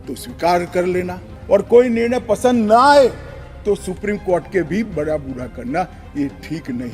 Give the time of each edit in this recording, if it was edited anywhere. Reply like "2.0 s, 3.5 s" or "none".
1.3 s